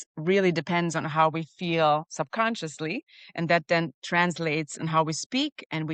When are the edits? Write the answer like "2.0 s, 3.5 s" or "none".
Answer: none